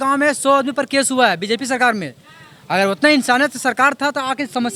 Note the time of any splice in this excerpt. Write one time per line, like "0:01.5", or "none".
none

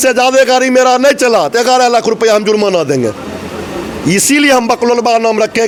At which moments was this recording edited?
none

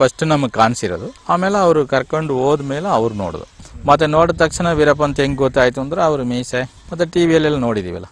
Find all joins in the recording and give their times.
0:01.1
0:03.5

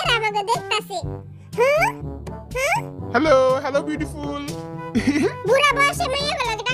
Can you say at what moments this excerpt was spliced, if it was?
none

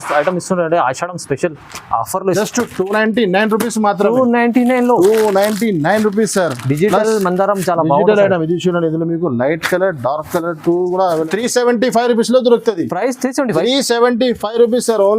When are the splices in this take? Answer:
0:02.4
0:11.3

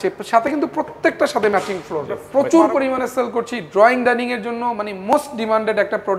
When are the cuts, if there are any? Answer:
0:02.2

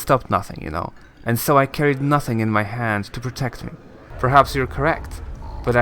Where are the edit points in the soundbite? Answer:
0:03.9

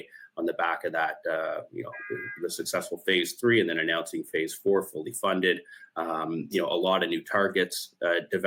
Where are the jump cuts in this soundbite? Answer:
none

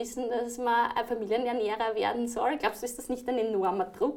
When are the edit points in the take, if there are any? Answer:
none

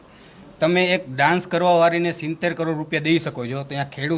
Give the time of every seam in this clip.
none

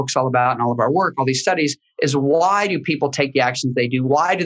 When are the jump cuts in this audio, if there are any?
none

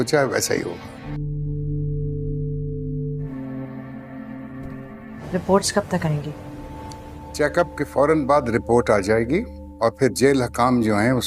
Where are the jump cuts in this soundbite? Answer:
0:01.1
0:03.3
0:05.2

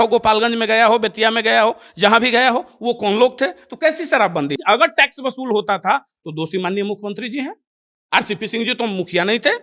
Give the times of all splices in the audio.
0:04.5

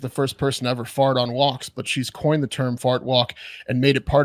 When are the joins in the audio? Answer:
none

